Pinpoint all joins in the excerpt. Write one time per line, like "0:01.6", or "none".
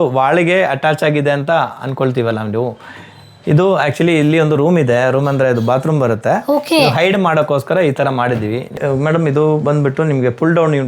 0:08.8